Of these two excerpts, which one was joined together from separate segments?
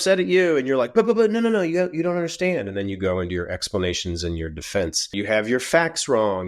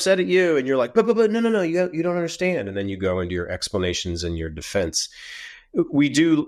first; 1 cut; at 5.1 s

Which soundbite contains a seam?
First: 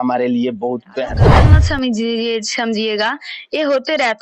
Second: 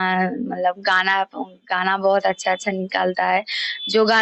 first; 1 cut; at 1.3 s

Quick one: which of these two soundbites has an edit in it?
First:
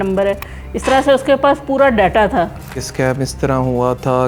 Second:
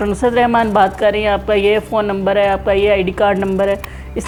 first; 1 cut; at 2.9 s

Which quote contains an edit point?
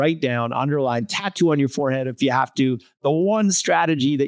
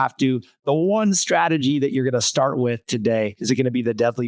second; 1 cut; at 3.4 s

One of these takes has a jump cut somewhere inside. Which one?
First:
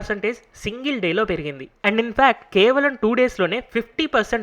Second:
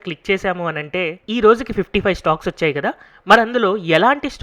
first; 1 cut; at 1.6 s

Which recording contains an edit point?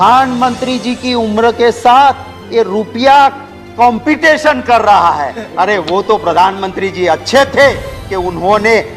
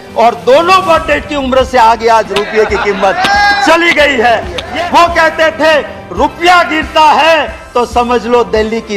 second; 1 cut; at 4.6 s

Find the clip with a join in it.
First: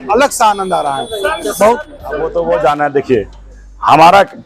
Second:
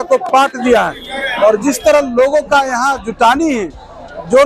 first; 1 cut; at 2.2 s

